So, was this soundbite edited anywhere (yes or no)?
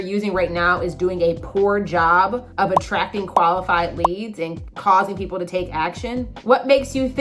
no